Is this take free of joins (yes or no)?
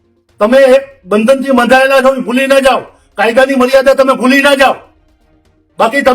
yes